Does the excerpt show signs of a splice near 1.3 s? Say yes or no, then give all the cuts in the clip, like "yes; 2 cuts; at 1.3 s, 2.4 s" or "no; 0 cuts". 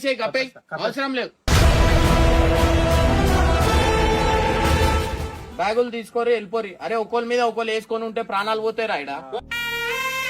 no; 1 cut; at 5.4 s